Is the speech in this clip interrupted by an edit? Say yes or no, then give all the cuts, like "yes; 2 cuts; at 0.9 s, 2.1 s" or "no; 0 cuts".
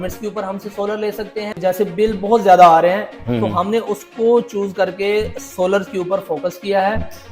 yes; 1 cut; at 1.5 s